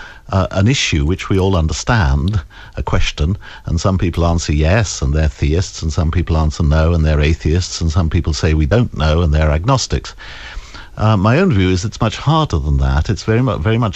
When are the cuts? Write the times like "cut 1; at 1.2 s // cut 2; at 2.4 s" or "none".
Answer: none